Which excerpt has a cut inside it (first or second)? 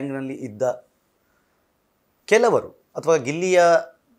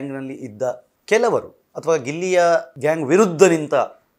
second